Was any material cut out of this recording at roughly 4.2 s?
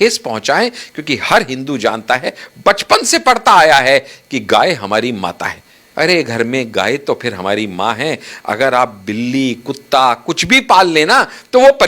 no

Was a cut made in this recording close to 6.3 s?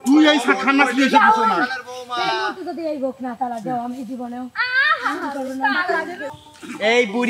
yes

